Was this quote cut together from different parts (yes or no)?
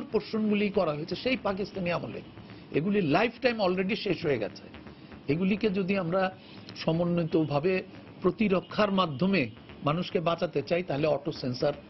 no